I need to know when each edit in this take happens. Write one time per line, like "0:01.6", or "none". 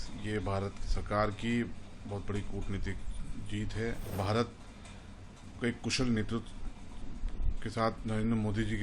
0:04.1